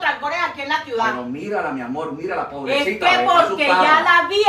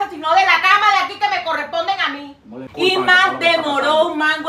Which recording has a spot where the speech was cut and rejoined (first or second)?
second